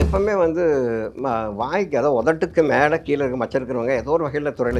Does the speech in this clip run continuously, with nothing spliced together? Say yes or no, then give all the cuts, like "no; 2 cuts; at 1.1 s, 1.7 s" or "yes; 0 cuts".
yes; 0 cuts